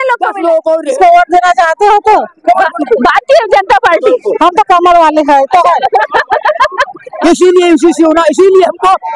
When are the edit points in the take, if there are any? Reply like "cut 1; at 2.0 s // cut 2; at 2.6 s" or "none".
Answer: cut 1; at 0.8 s // cut 2; at 7.0 s